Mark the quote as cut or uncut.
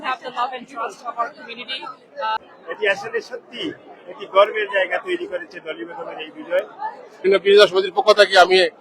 cut